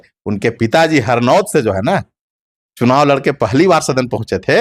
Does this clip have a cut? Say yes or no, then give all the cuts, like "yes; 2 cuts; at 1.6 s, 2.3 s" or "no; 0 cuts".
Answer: no; 0 cuts